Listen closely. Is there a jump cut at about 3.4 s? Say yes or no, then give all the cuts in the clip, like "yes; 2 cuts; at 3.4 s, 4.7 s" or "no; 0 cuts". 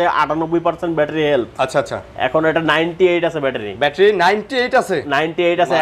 no; 0 cuts